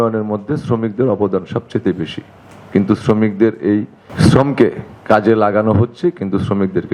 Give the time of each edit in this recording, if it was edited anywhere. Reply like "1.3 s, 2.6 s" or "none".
none